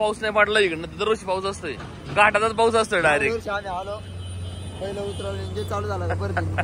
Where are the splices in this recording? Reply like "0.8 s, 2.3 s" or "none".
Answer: none